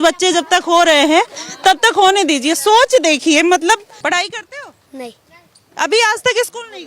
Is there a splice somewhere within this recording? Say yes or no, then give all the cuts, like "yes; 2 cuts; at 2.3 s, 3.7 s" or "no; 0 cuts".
yes; 1 cut; at 3.9 s